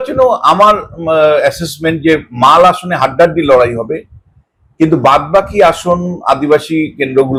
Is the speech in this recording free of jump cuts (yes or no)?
yes